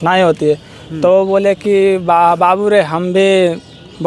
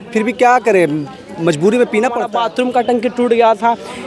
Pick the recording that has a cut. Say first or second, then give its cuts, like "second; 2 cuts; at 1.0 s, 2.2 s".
second; 1 cut; at 2.3 s